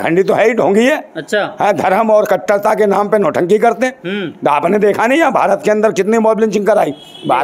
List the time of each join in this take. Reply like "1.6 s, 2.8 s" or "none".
none